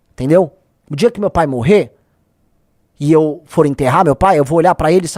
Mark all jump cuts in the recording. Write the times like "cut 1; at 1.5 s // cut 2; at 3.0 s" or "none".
none